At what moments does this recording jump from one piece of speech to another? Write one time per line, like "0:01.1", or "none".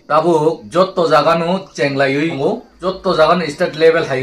0:02.7